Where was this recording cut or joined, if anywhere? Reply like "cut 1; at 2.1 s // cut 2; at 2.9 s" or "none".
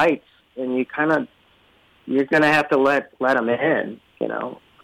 none